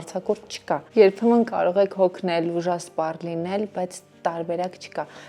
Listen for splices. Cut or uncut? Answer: uncut